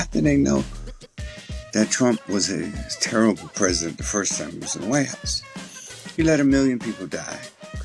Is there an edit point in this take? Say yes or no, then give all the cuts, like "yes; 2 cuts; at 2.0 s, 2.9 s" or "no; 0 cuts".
no; 0 cuts